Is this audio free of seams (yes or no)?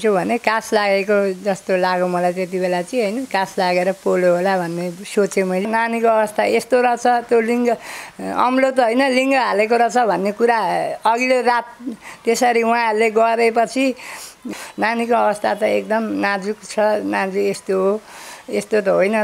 no